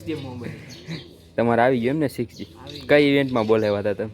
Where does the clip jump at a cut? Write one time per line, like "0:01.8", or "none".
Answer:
0:00.9